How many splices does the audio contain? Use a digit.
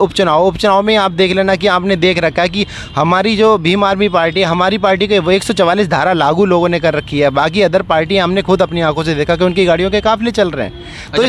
0